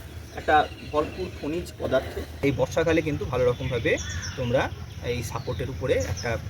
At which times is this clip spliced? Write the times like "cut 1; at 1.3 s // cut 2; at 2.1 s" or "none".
cut 1; at 2.4 s